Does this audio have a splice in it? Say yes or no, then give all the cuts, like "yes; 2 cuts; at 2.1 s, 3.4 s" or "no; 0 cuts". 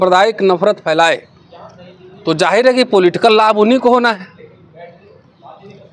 no; 0 cuts